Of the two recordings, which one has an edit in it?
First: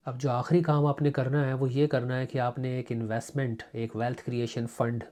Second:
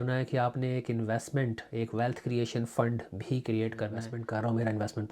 second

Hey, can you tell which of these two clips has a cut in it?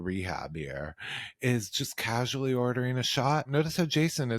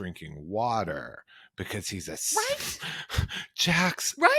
first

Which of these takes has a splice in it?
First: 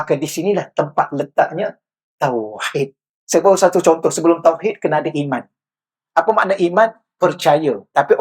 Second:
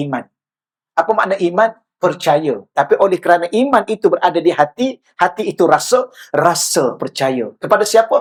first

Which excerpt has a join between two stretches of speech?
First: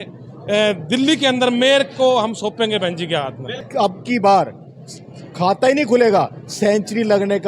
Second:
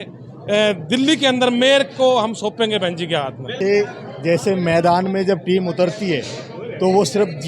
first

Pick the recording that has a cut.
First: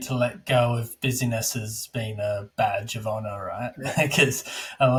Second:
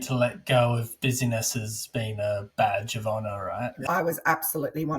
second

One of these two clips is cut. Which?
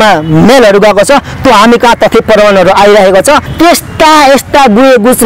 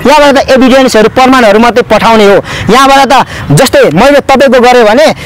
first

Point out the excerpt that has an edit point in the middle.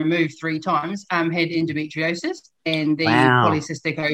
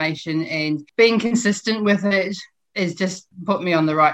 second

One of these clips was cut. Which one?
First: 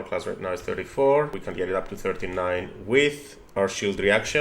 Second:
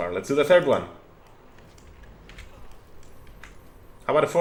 first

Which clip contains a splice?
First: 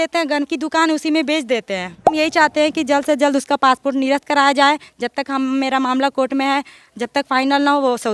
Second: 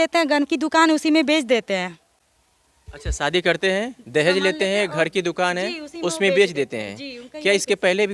first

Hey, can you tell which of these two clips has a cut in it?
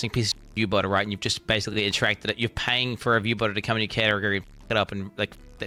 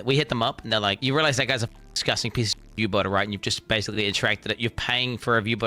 second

